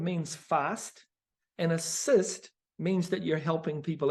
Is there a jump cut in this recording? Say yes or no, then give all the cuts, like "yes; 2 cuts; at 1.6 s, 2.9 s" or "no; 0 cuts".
no; 0 cuts